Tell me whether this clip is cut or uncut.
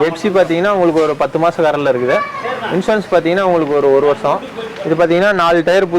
uncut